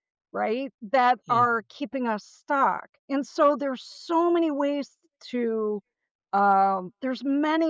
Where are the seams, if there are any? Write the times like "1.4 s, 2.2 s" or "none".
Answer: 2.9 s